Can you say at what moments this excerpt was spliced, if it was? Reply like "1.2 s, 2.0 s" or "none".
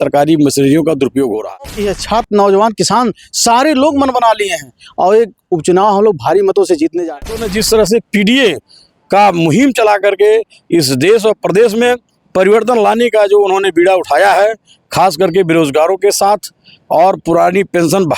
1.9 s, 7.5 s